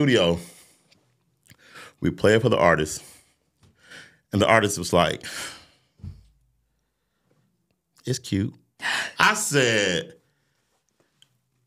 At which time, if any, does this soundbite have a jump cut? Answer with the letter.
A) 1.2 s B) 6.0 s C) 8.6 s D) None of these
D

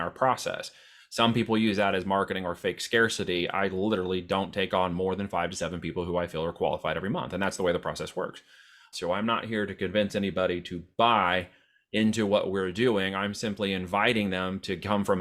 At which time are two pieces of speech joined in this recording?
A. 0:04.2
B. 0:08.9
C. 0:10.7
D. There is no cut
B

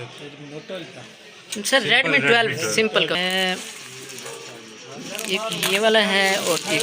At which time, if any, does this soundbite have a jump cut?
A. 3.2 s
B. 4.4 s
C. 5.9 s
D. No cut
A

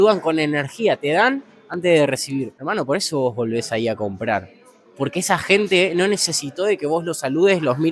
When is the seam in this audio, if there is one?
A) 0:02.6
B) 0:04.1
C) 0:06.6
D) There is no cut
A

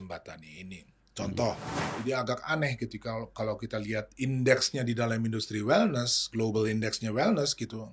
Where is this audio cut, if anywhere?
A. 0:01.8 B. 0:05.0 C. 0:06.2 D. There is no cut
A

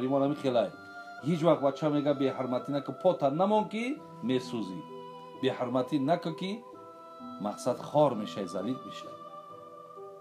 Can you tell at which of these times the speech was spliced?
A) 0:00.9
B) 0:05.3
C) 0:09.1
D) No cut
C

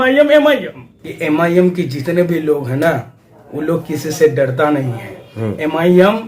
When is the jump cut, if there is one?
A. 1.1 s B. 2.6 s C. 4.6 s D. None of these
A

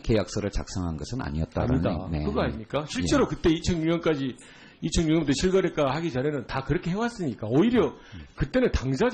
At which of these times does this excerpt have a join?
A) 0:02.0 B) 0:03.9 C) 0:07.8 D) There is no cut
D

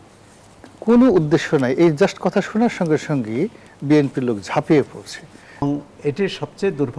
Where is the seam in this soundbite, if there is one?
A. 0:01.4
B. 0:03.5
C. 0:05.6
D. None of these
C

